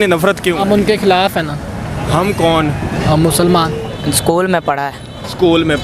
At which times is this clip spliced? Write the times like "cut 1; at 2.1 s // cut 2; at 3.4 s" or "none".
cut 1; at 3.9 s